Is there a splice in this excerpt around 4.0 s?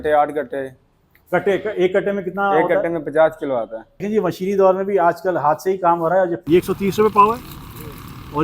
yes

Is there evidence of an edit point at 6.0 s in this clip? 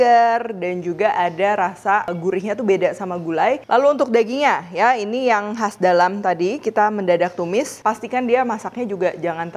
no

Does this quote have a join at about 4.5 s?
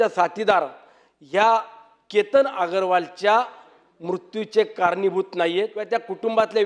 no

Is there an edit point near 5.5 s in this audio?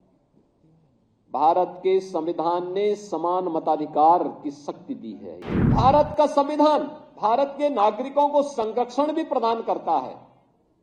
yes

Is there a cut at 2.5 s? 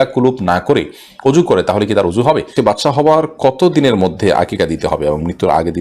yes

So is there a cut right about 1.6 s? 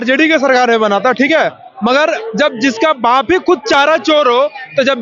no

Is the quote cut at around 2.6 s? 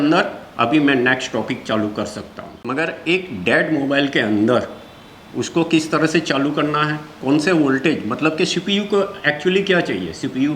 yes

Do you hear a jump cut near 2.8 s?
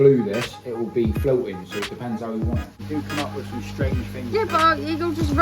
yes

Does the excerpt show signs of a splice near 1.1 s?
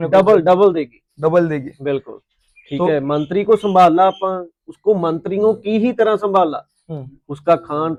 no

